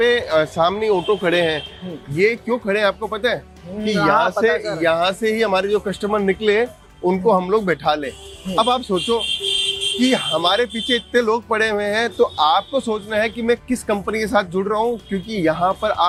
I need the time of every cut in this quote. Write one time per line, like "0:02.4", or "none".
none